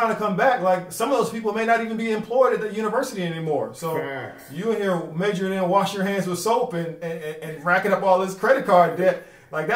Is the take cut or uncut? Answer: uncut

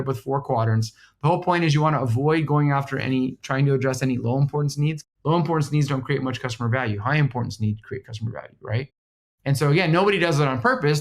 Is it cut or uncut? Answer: cut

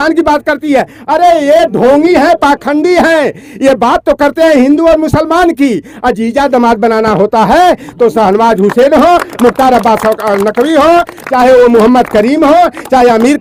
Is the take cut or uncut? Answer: uncut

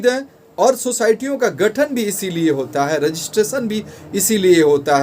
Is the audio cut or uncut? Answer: uncut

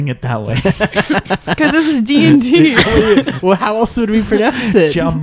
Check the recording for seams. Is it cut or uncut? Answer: uncut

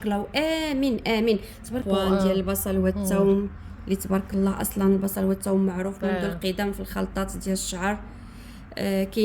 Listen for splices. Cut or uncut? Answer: cut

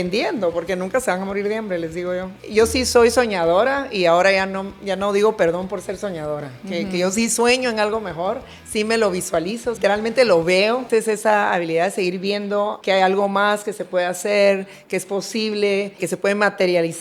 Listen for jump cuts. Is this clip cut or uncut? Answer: cut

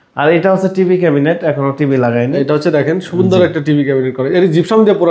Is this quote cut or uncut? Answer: uncut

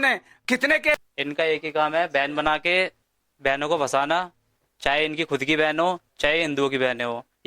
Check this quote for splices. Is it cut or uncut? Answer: cut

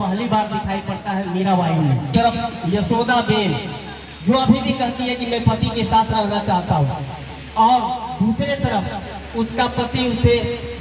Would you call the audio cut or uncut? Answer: cut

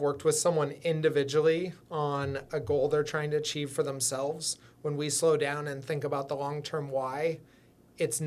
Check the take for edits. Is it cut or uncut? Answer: uncut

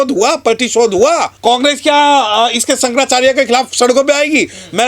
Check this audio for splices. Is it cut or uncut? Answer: cut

